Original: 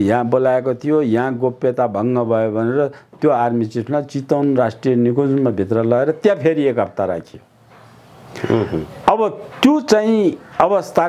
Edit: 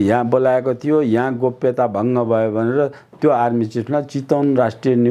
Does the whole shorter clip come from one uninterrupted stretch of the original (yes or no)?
yes